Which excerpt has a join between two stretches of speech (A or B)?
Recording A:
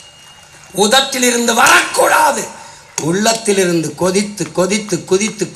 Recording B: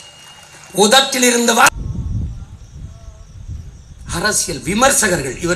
B